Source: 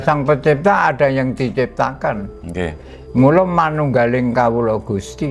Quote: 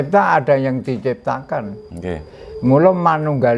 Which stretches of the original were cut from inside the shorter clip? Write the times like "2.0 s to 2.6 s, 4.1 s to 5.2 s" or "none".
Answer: none